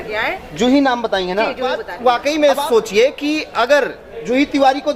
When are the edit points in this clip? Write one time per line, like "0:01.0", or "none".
0:01.9